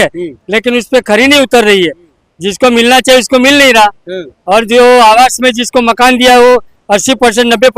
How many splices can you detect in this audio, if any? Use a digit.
0